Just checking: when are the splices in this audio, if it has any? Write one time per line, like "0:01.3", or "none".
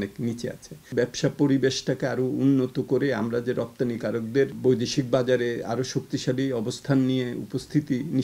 0:00.9
0:04.5